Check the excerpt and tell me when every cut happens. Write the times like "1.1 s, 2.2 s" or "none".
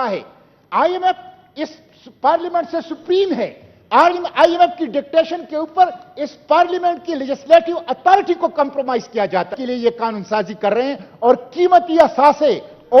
none

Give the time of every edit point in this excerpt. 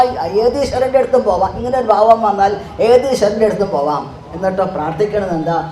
none

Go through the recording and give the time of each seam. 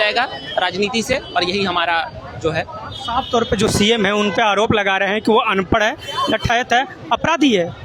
none

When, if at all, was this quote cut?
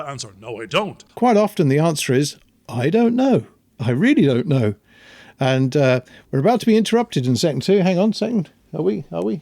1.0 s

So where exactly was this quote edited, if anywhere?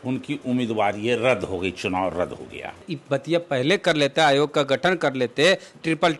2.7 s

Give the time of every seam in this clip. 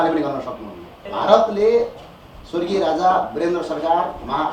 1.0 s

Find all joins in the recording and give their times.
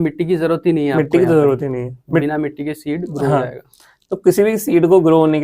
none

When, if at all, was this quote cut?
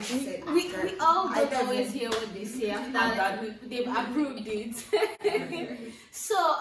none

